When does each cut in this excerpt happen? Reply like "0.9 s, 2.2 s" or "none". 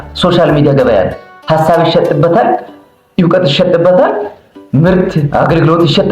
4.6 s